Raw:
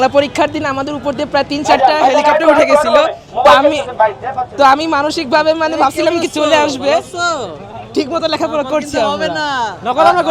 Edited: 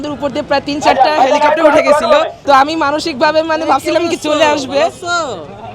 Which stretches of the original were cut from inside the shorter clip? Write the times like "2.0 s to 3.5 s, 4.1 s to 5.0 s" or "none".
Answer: 3.2 s to 4.5 s